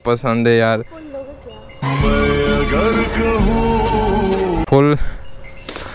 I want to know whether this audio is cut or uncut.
uncut